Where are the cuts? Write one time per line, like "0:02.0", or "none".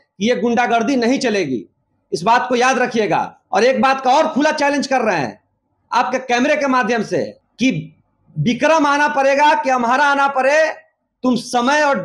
0:03.4
0:07.4